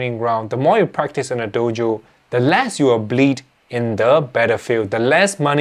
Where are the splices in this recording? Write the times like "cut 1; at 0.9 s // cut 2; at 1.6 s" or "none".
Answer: none